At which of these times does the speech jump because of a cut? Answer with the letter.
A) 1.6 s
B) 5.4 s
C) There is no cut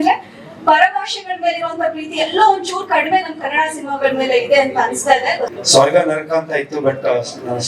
B